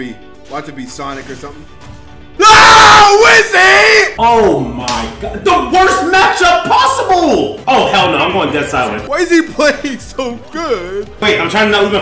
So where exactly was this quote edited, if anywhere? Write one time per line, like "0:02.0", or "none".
0:09.0
0:11.2